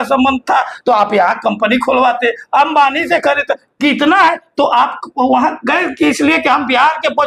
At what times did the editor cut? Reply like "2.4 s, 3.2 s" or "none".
none